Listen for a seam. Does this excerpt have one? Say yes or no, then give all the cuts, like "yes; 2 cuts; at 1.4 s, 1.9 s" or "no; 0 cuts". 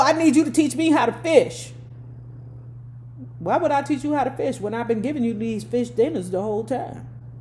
no; 0 cuts